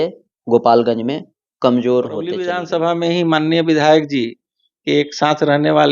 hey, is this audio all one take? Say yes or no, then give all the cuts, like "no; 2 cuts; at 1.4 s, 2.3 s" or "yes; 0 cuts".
no; 1 cut; at 2.6 s